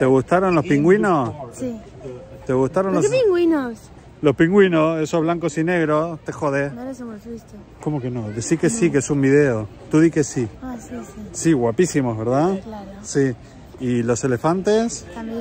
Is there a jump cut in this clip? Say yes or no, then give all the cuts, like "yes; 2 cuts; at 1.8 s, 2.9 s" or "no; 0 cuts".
no; 0 cuts